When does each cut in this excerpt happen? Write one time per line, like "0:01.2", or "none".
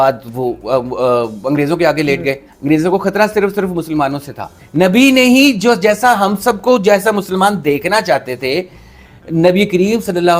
0:02.5
0:04.6

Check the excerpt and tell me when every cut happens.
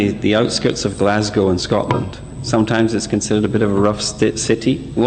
0:03.7

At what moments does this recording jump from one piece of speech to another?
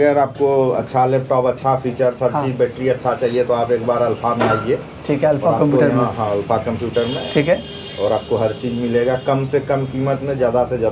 none

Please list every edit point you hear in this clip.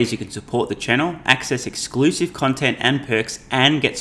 none

